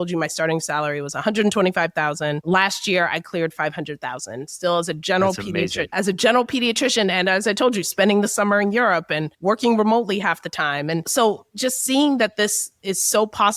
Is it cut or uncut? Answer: cut